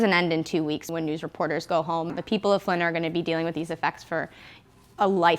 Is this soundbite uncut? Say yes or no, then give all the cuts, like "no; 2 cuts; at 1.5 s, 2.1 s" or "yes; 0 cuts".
no; 2 cuts; at 0.9 s, 2.1 s